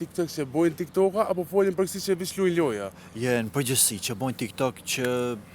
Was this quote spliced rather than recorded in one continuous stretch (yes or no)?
no